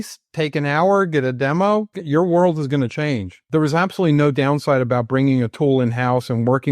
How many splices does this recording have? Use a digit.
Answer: 2